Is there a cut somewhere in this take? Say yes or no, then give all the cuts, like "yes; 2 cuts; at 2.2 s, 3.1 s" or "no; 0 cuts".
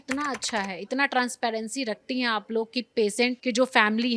no; 0 cuts